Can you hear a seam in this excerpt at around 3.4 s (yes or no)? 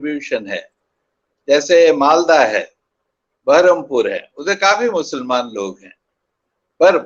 no